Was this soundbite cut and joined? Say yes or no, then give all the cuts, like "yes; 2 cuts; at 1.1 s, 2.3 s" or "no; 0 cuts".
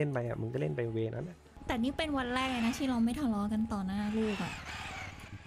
yes; 1 cut; at 1.5 s